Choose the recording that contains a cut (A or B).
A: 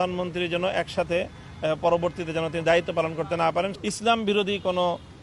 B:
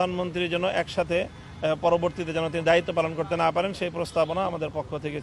A